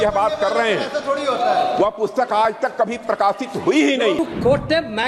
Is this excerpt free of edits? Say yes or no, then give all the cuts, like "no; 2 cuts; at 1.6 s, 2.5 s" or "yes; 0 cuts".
no; 1 cut; at 4.2 s